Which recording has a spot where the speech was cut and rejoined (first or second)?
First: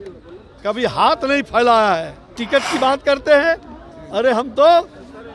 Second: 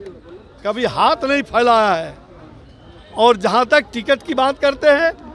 first